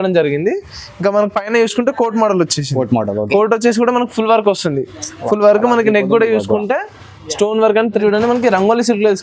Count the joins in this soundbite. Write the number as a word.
one